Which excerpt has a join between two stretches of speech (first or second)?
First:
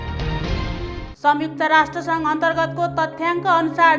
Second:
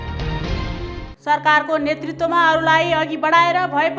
first